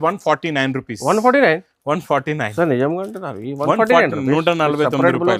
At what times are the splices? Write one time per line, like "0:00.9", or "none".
none

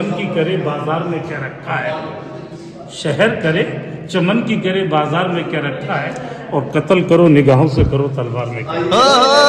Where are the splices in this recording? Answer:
none

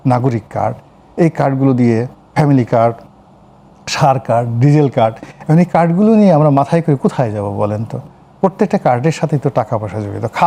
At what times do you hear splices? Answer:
none

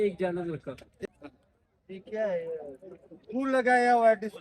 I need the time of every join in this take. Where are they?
0:01.0

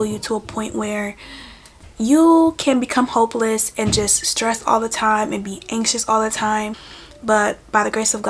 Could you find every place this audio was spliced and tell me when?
none

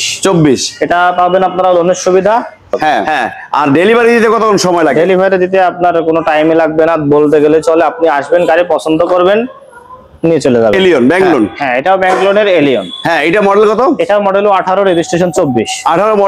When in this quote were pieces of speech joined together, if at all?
0:03.1
0:10.8

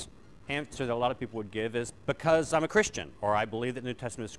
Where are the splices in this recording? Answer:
0:02.7

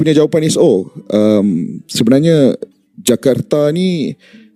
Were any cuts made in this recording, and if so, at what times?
none

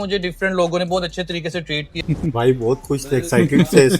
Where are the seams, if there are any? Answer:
0:01.9

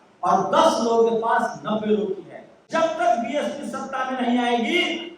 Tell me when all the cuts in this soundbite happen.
0:02.7

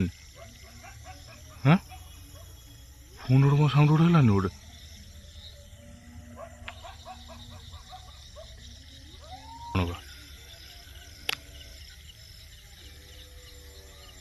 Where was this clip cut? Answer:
0:09.8

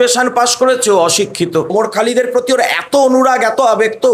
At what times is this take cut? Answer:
0:01.7

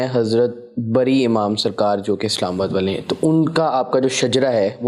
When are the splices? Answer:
none

